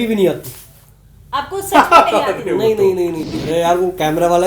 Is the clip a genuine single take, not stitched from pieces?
no; 1 cut; at 3.2 s

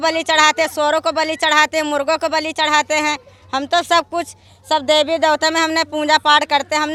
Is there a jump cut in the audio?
no; 0 cuts

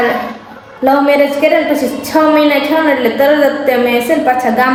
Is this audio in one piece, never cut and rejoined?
yes; 0 cuts

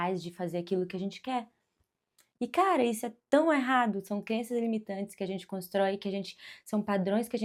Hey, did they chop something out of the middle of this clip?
no; 0 cuts

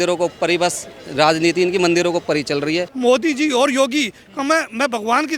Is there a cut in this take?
yes; 1 cut; at 2.9 s

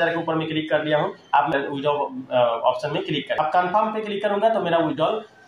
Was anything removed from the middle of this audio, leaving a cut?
yes; 2 cuts; at 1.5 s, 3.4 s

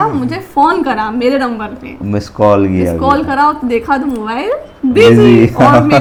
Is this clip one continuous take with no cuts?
yes; 0 cuts

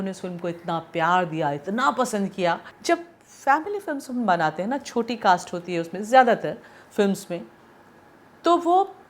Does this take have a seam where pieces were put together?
yes; 1 cut; at 2.7 s

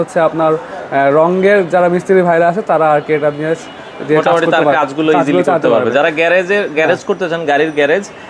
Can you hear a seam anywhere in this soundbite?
no; 0 cuts

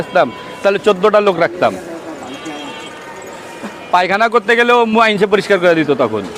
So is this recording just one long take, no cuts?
yes; 0 cuts

